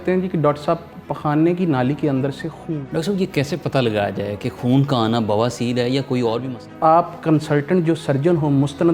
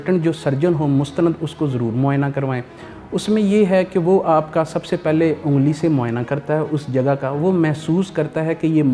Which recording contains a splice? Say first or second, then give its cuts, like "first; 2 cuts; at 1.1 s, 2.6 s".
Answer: first; 2 cuts; at 2.6 s, 6.7 s